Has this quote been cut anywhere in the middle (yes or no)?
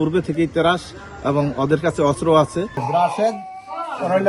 yes